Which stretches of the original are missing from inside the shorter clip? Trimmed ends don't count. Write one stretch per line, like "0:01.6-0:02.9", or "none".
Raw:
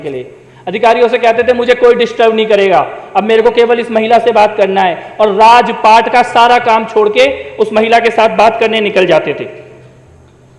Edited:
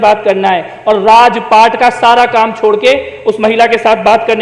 none